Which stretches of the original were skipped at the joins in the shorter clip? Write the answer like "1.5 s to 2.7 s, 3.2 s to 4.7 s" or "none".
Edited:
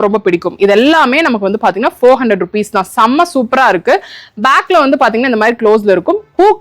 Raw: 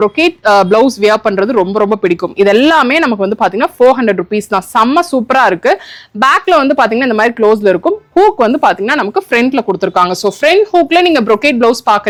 none

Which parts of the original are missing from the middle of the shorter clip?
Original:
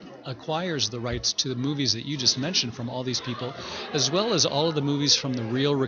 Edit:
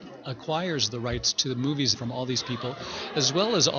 2.0 s to 2.7 s

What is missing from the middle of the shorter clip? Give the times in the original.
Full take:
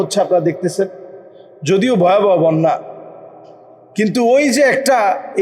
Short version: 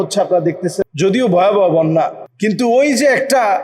0.9 s to 1.5 s, 2.9 s to 3.8 s

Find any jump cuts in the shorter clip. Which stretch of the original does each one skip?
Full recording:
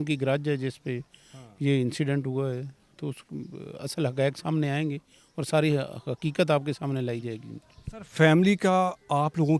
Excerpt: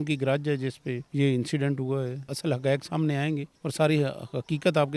1.0 s to 1.5 s, 2.7 s to 3.8 s, 5.1 s to 5.3 s

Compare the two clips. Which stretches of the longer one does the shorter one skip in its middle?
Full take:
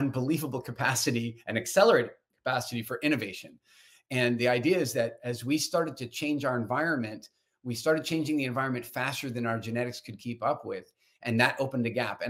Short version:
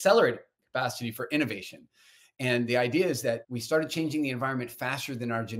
5.2 s to 7.6 s

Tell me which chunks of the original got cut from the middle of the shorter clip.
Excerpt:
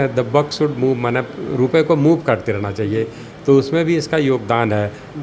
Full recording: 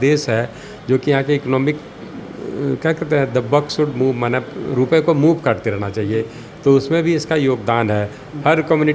none

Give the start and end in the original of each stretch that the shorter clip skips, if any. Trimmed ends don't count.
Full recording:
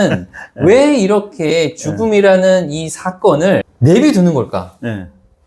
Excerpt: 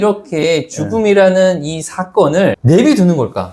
3.7 s to 3.8 s

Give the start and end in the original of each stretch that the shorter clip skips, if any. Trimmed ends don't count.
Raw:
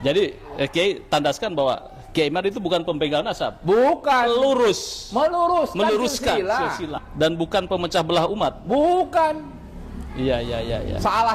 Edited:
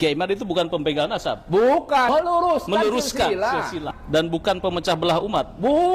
4.2 s to 5.1 s

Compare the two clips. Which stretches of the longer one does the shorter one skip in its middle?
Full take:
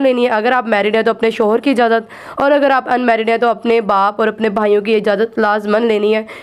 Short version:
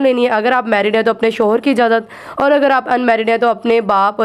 none

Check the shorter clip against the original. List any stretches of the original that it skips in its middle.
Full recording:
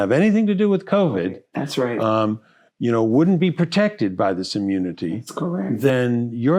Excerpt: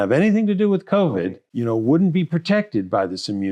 1.4 s to 2.7 s

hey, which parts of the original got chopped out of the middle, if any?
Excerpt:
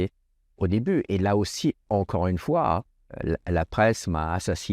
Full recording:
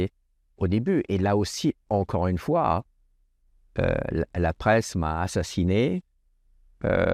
3.2 s to 4.1 s

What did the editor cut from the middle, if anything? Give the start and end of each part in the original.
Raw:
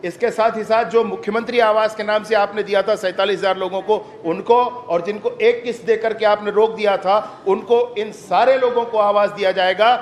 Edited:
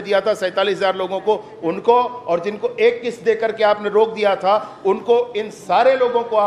none

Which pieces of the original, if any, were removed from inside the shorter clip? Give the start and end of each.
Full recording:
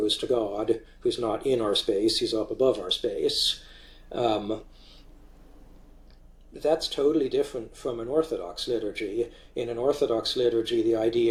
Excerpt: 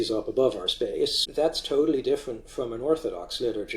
3.4 s to 6.5 s

